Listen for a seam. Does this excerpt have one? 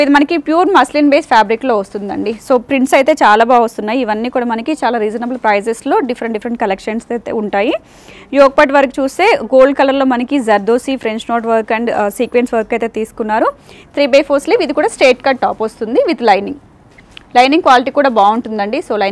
no; 0 cuts

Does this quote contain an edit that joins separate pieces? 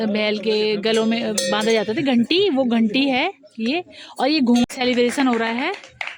yes; 1 cut; at 4.7 s

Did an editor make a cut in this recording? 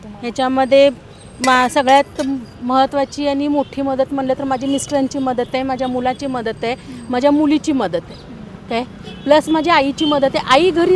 no; 0 cuts

